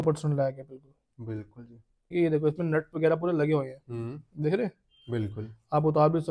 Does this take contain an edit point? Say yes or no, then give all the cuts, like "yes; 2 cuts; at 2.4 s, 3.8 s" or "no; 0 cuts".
yes; 1 cut; at 2.0 s